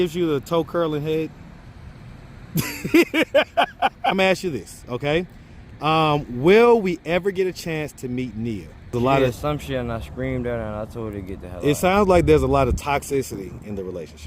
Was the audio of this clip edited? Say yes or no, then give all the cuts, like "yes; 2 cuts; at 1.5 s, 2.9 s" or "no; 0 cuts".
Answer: yes; 2 cuts; at 4.1 s, 8.9 s